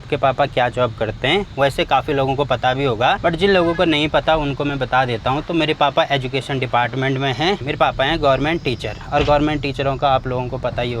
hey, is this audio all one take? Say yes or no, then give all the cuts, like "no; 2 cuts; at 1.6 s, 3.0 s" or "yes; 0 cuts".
yes; 0 cuts